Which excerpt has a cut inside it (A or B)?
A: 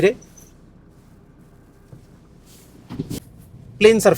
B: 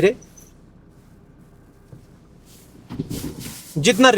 A